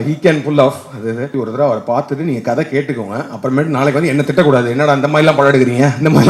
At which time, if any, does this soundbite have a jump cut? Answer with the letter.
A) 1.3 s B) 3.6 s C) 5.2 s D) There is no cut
A